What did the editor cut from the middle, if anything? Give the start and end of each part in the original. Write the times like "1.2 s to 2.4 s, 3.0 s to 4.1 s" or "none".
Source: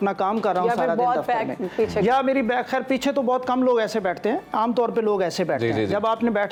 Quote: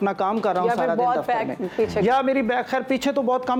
none